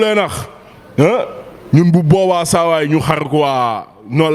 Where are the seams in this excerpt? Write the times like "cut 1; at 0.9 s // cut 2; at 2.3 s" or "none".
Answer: none